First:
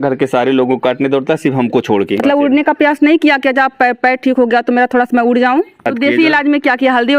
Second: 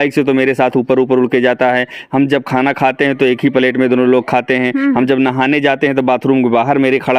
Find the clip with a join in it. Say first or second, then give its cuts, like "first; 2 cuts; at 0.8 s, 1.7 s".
first; 2 cuts; at 2.2 s, 5.9 s